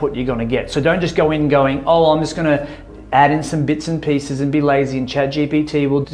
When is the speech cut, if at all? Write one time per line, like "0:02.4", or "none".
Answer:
none